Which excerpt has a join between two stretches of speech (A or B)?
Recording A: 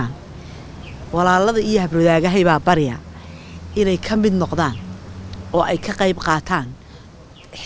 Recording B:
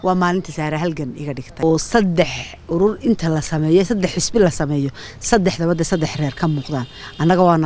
B